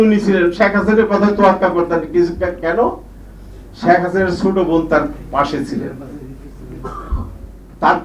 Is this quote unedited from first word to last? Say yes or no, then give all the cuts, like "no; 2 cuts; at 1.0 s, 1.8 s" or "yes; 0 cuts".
yes; 0 cuts